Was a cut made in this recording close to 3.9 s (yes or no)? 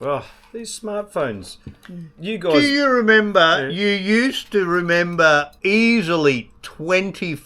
no